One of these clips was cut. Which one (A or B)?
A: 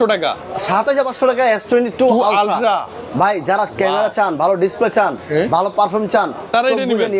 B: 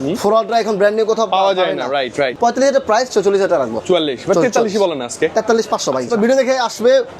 B